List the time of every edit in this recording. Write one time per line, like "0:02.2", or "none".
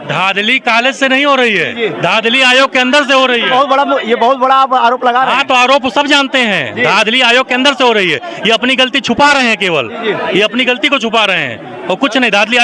none